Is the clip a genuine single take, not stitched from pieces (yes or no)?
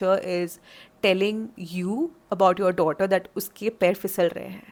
yes